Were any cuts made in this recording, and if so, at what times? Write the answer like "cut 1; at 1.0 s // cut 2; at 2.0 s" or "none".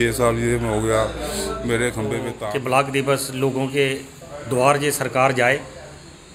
cut 1; at 2.3 s